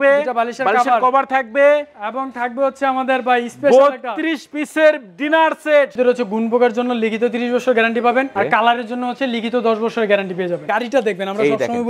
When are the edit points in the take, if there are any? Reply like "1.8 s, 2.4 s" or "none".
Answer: 5.9 s, 10.6 s